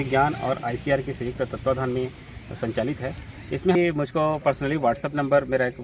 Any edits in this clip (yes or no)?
yes